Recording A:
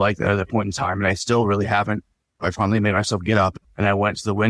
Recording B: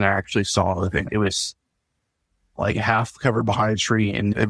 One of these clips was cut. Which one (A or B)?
A